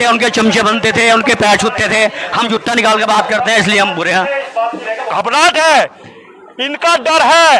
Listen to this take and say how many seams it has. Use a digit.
1